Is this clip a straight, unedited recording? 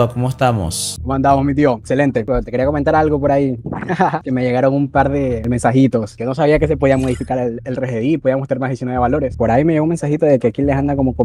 yes; 0 cuts

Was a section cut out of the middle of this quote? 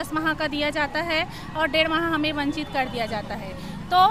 no; 0 cuts

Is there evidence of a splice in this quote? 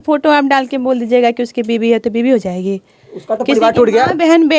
no; 0 cuts

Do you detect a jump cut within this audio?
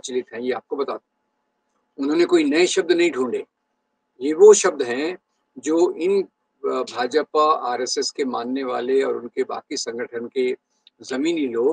no; 0 cuts

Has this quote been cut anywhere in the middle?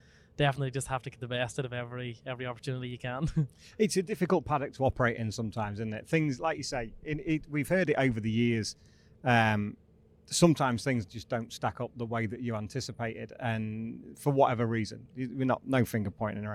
no; 0 cuts

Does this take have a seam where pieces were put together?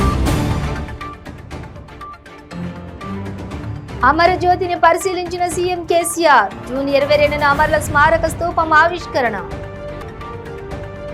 yes; 1 cut; at 4.0 s

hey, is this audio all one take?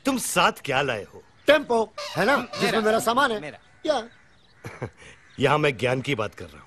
yes; 0 cuts

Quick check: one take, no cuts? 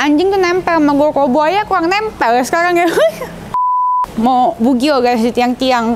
no; 1 cut; at 3.8 s

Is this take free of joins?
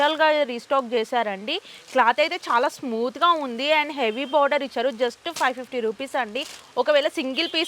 yes; 0 cuts

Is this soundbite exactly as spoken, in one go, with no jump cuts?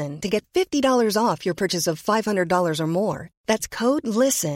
yes; 0 cuts

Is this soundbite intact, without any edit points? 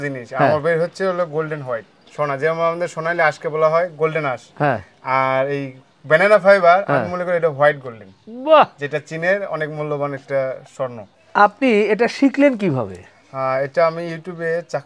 yes; 0 cuts

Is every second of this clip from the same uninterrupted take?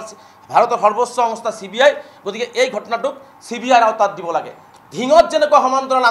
no; 1 cut; at 4.6 s

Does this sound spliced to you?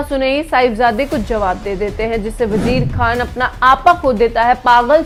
no; 0 cuts

